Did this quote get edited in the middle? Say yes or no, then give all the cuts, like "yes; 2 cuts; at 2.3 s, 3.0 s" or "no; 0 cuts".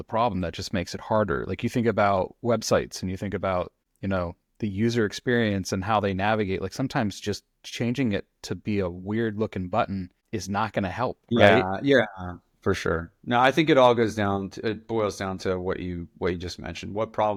no; 0 cuts